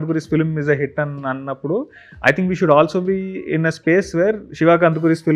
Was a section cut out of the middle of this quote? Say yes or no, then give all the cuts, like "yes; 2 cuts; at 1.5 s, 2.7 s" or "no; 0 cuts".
no; 0 cuts